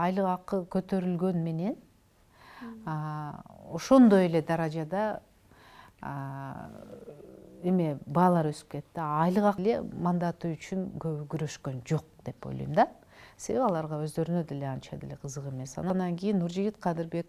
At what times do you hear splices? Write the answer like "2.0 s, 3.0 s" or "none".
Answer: 9.6 s, 15.9 s